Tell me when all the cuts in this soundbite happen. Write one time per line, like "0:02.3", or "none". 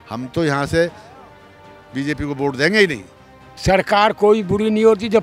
0:03.4